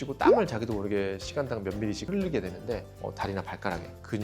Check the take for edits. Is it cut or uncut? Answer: cut